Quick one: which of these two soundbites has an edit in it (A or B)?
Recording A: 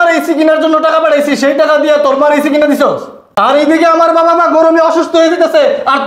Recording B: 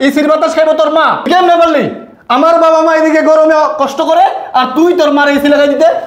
B